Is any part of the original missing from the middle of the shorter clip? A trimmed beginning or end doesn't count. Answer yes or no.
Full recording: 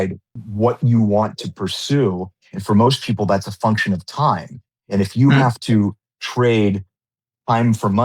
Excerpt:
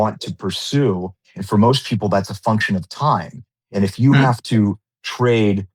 no